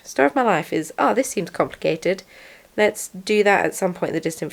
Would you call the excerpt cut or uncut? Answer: uncut